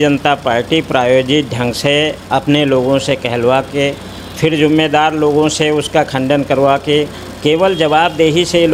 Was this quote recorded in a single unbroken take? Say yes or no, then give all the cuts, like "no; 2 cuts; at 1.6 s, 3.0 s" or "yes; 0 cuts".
yes; 0 cuts